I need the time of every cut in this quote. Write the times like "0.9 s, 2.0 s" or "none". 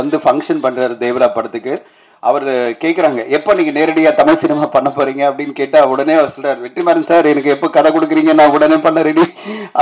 none